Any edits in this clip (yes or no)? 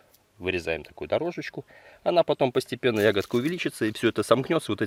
no